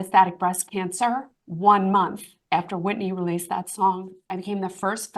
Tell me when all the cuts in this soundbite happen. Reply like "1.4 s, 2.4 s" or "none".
4.2 s